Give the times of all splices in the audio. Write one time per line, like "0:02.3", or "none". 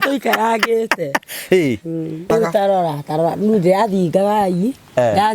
0:02.3